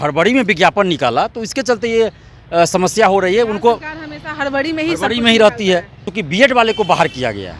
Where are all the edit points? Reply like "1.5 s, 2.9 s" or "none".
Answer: 6.1 s